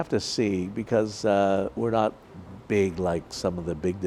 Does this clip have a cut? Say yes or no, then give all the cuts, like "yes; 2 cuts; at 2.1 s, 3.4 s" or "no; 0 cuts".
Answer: no; 0 cuts